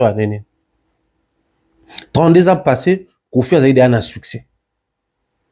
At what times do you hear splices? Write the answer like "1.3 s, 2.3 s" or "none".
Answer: none